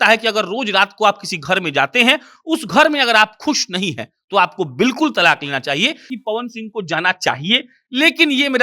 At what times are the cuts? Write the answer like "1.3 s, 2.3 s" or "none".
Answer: 6.1 s